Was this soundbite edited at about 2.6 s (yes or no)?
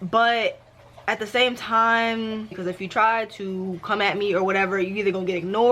yes